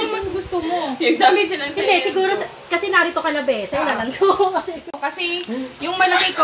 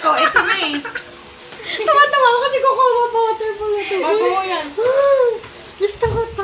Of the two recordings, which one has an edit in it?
first; 1 cut; at 4.9 s

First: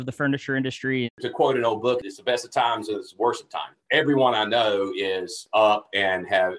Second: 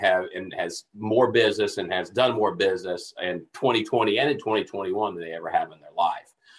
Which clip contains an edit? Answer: first; 4 cuts; at 1.1 s, 2.1 s, 3.7 s, 5.3 s

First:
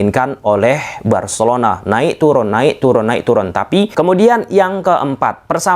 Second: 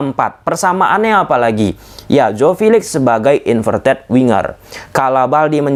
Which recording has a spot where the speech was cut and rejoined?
first; 1 cut; at 3.9 s

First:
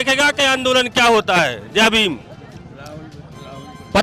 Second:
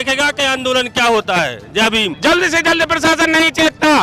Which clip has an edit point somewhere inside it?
second; 1 cut; at 2.1 s

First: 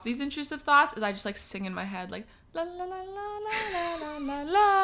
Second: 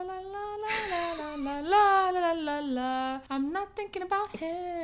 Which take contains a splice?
second; 1 cut; at 3.2 s

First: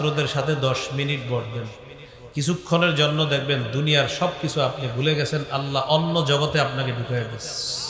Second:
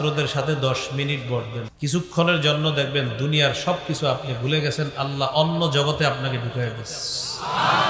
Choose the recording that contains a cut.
second; 1 cut; at 1.6 s

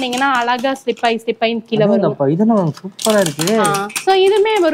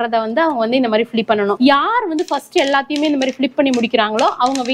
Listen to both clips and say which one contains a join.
second; 1 cut; at 1.5 s

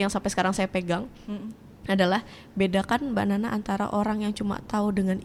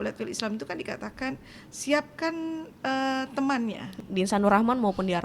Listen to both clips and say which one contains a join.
second; 1 cut; at 3.9 s

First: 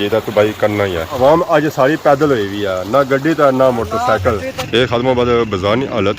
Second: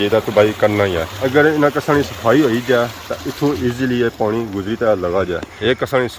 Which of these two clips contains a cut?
first; 2 cuts; at 1.1 s, 4.5 s

